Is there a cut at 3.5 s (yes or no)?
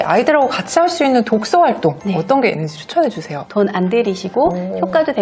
yes